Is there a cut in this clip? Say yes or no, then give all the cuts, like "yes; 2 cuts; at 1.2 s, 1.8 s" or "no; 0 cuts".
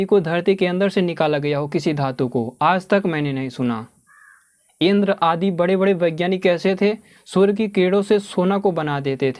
no; 0 cuts